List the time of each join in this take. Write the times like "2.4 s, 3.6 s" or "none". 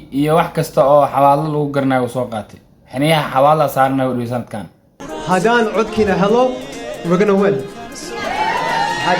4.9 s